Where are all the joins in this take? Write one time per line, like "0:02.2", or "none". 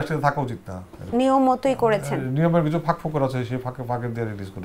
0:01.1